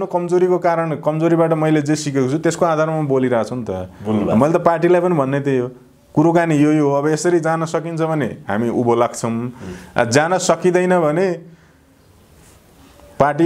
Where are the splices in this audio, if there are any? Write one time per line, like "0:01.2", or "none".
none